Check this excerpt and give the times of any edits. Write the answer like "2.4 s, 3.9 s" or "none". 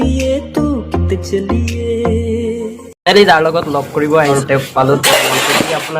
3.0 s, 4.3 s